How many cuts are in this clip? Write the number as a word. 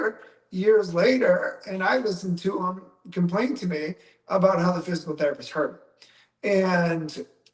zero